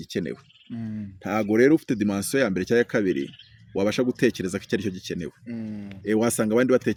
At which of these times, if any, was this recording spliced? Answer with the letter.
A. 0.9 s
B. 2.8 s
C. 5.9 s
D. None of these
D